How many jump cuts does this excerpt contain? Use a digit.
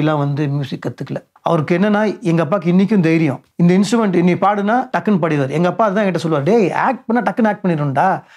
3